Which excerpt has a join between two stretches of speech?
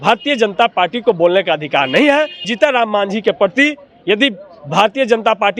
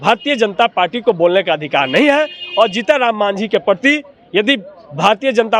first; 1 cut; at 2.5 s

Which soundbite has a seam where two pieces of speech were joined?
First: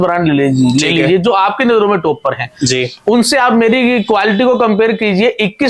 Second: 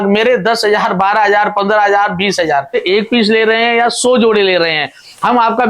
second; 1 cut; at 2.8 s

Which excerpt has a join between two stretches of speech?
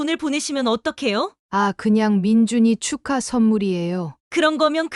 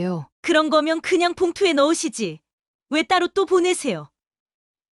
first; 1 cut; at 1.4 s

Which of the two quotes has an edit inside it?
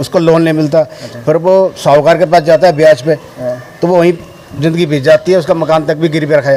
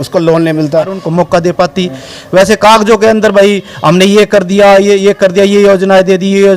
second; 1 cut; at 1.0 s

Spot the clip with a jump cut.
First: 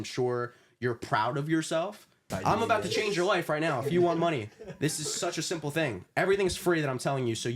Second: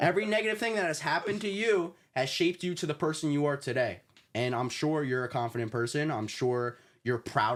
first; 1 cut; at 2.3 s

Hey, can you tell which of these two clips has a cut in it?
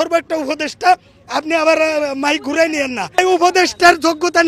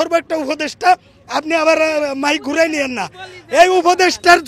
first; 1 cut; at 3.2 s

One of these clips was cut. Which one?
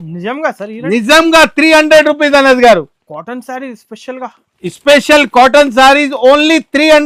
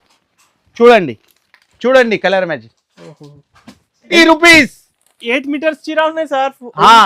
second; 1 cut; at 4.1 s

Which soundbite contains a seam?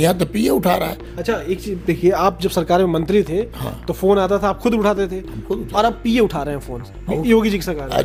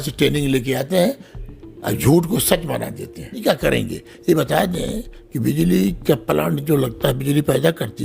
second; 1 cut; at 3.4 s

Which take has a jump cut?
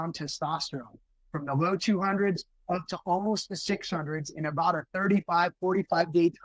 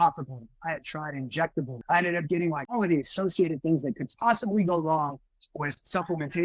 second; 2 cuts; at 1.8 s, 2.7 s

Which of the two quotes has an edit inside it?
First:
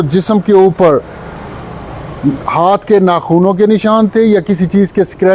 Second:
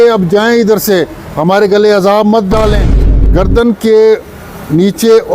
second; 1 cut; at 3.1 s

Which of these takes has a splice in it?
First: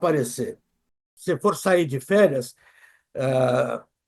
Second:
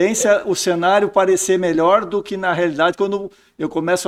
first; 1 cut; at 1.0 s

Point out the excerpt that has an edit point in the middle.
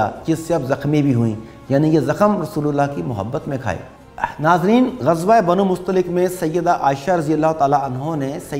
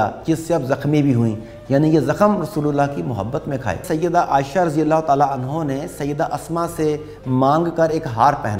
second; 1 cut; at 3.9 s

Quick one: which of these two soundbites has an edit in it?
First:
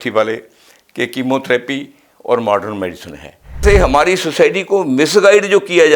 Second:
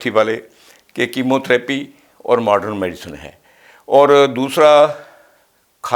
first; 1 cut; at 3.6 s

